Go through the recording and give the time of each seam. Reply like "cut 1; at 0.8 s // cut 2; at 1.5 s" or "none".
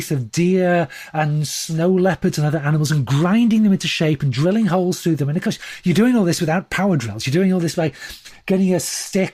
none